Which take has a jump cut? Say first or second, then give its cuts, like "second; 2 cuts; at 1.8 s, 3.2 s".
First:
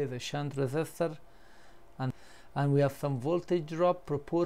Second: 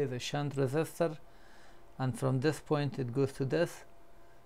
first; 1 cut; at 2.1 s